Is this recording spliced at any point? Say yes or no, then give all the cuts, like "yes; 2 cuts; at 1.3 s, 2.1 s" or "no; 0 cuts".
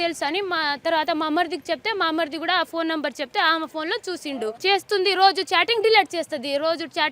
yes; 1 cut; at 4.6 s